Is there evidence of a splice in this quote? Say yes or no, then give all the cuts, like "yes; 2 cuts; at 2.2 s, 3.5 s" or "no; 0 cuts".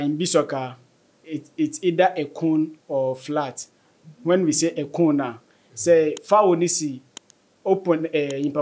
no; 0 cuts